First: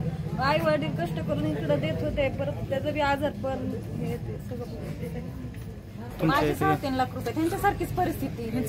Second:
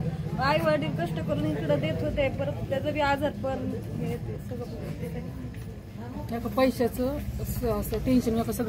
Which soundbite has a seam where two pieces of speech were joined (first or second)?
first